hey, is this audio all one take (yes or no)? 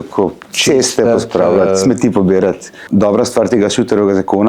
no